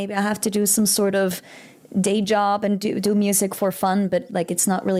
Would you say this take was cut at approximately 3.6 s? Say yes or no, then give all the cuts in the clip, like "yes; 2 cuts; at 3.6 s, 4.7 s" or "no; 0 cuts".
no; 0 cuts